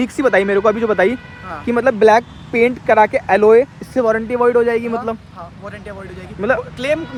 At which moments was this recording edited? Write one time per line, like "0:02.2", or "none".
none